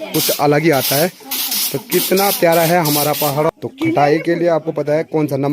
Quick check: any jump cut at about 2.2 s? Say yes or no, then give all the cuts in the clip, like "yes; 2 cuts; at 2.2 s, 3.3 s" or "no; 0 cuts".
no; 1 cut; at 3.5 s